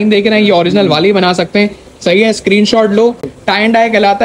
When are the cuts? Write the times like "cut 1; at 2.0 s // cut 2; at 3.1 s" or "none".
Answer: cut 1; at 3.3 s